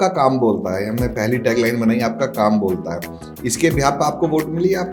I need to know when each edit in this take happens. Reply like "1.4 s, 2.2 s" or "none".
none